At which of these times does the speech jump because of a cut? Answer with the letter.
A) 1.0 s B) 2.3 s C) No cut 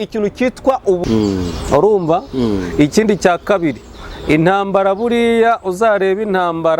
A